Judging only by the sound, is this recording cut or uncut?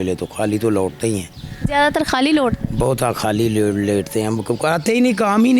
uncut